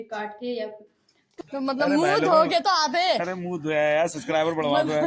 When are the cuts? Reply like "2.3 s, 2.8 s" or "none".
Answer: 1.2 s